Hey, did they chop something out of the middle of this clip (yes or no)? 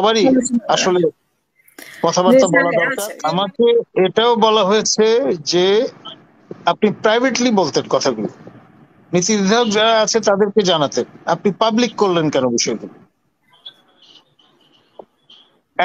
yes